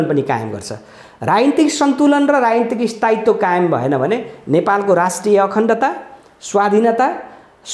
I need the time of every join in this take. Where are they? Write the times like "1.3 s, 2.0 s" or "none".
none

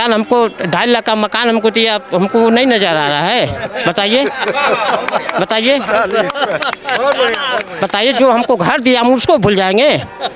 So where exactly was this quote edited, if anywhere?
none

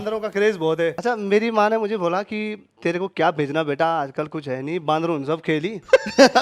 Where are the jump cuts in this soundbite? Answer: 1.0 s

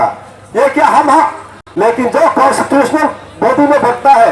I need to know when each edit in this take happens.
1.6 s

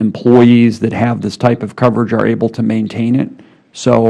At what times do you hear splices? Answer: none

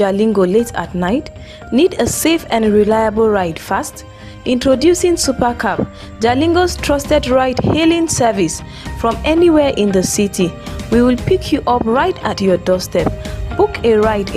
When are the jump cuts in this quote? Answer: none

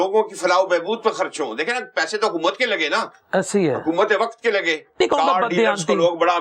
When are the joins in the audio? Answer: 5.0 s

